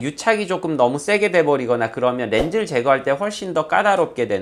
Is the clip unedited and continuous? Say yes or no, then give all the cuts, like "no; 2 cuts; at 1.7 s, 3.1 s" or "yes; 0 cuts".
yes; 0 cuts